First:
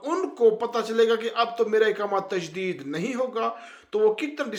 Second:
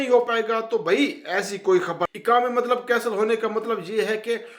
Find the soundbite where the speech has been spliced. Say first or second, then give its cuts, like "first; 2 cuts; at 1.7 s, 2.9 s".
second; 1 cut; at 2.1 s